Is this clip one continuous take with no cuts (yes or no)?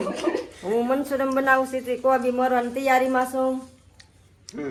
yes